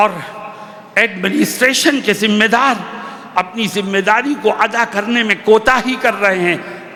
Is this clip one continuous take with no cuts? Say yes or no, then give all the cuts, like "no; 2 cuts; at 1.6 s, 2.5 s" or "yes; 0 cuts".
yes; 0 cuts